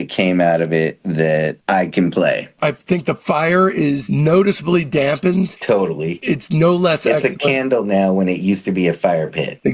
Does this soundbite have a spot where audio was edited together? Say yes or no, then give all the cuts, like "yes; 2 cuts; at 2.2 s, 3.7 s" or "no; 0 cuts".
yes; 2 cuts; at 2.5 s, 4.0 s